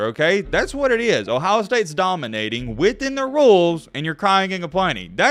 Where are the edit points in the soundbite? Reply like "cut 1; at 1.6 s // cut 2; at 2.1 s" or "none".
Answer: none